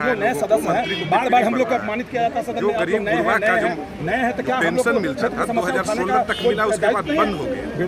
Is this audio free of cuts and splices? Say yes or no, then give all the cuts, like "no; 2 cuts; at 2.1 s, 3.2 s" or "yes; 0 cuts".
yes; 0 cuts